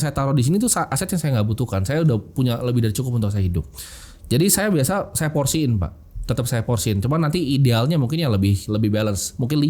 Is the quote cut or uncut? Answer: uncut